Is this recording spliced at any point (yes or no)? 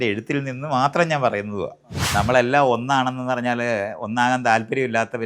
yes